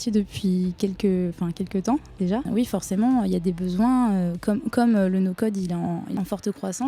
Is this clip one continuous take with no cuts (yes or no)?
no